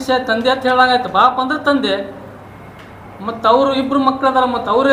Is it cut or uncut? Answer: uncut